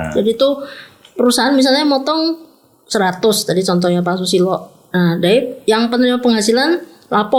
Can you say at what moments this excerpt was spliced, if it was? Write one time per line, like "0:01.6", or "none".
none